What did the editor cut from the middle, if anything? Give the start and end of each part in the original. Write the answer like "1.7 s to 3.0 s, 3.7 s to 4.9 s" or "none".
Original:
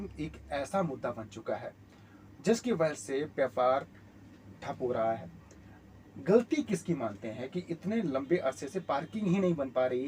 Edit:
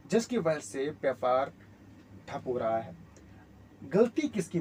none